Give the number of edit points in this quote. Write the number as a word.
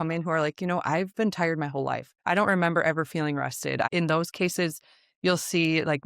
two